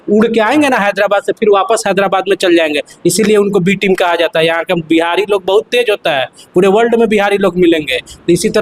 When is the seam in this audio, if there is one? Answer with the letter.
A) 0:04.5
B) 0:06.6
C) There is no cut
C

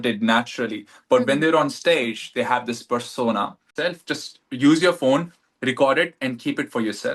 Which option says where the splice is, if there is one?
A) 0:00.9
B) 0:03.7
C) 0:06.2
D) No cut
B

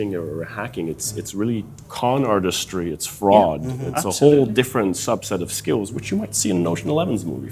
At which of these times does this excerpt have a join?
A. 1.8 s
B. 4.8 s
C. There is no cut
C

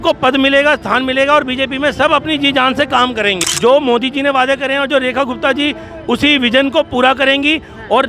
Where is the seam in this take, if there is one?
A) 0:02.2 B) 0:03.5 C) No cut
B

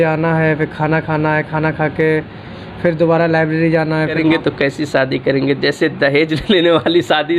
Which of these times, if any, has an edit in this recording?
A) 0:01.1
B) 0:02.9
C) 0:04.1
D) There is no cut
C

